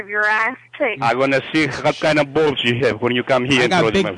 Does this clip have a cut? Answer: yes; 1 cut; at 1.0 s

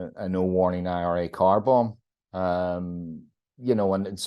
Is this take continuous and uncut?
yes; 0 cuts

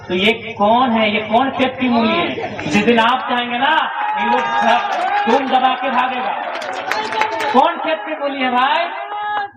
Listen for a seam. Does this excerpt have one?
no; 0 cuts

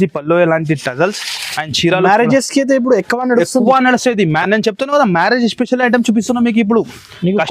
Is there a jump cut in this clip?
no; 0 cuts

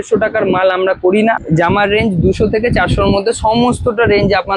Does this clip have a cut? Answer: yes; 1 cut; at 1.4 s

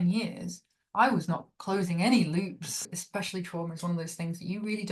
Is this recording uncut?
no; 1 cut; at 2.8 s

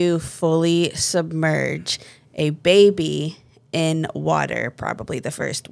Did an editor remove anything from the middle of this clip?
no; 0 cuts

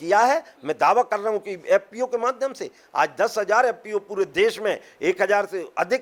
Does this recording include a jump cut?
no; 0 cuts

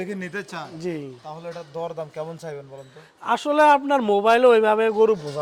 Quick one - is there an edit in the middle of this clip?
no; 0 cuts

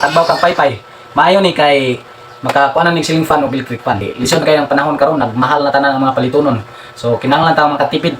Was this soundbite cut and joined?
yes; 1 cut; at 4.0 s

